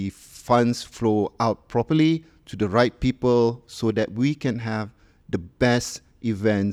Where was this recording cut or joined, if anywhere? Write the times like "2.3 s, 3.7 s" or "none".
none